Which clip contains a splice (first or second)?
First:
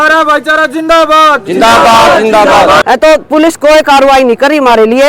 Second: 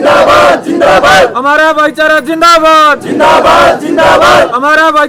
first